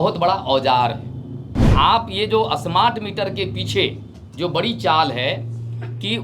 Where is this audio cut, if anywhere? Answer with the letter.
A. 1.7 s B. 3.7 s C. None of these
A